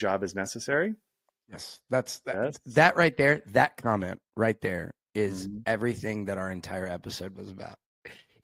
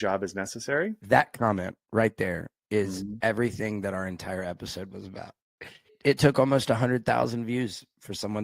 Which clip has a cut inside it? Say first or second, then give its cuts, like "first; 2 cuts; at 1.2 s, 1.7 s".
second; 2 cuts; at 1.0 s, 5.9 s